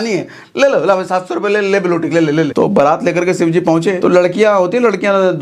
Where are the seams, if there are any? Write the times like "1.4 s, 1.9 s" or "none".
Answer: 2.5 s, 4.0 s